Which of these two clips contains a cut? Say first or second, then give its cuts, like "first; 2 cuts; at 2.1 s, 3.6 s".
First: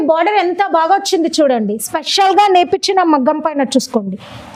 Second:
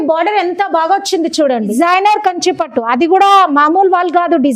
second; 1 cut; at 1.7 s